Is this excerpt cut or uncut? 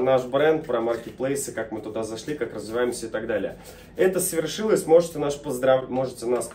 uncut